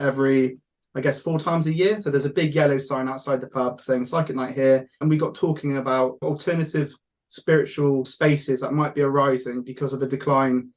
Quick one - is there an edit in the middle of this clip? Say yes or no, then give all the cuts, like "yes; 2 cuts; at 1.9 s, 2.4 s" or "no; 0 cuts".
yes; 3 cuts; at 4.9 s, 6.2 s, 8.1 s